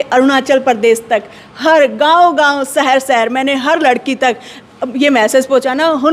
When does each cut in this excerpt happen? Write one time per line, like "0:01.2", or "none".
none